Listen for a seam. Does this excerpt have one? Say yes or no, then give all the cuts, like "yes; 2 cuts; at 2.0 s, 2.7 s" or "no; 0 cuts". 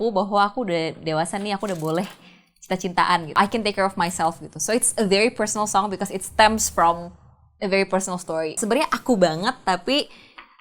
yes; 2 cuts; at 3.4 s, 8.6 s